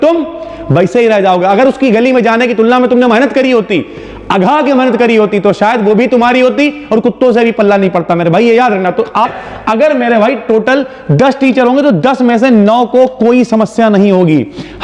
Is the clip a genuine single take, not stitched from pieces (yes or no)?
no